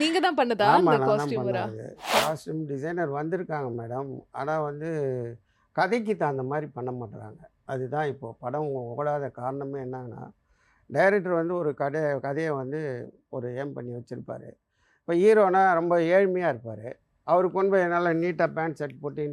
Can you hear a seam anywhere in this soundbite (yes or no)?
yes